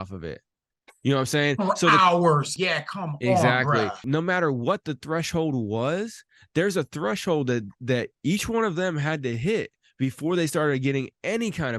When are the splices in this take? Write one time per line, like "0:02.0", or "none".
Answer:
0:02.5
0:04.0